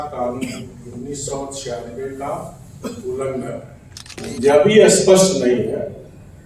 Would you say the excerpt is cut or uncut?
cut